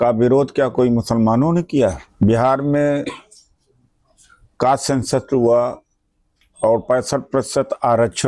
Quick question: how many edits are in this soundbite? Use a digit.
1